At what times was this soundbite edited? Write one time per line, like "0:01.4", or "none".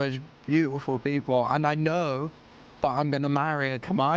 none

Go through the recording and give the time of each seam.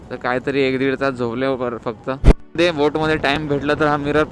0:02.2

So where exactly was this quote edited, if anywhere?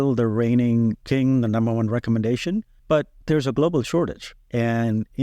0:01.0
0:03.0

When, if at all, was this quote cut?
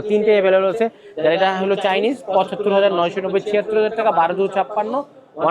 none

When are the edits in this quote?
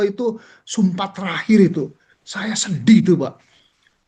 none

